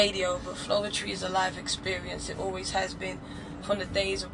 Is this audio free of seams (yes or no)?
yes